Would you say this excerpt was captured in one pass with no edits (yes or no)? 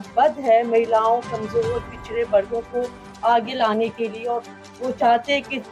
yes